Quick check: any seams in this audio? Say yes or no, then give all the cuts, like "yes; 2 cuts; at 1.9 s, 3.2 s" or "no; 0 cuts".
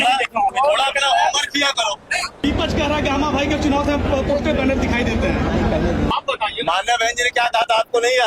yes; 2 cuts; at 2.4 s, 6.1 s